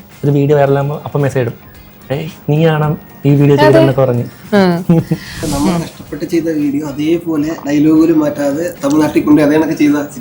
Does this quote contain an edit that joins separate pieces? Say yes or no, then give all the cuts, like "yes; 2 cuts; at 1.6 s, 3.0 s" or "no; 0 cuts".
yes; 1 cut; at 5.3 s